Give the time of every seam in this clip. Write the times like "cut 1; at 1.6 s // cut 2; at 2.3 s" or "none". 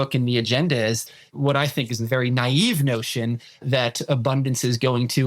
cut 1; at 1.0 s